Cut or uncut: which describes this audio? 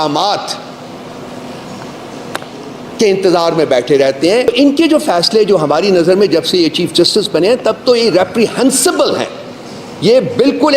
cut